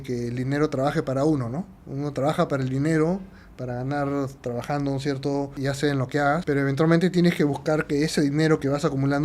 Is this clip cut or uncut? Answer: cut